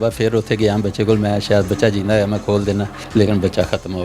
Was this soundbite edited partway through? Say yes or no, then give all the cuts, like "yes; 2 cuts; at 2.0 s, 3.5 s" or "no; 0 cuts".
yes; 1 cut; at 3.0 s